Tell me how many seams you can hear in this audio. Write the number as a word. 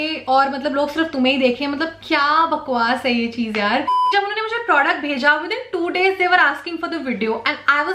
one